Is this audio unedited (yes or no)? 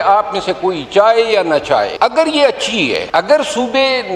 no